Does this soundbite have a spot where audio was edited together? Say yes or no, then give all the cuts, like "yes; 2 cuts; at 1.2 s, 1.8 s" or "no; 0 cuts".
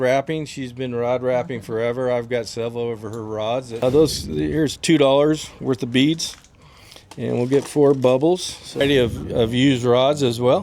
yes; 2 cuts; at 3.8 s, 8.8 s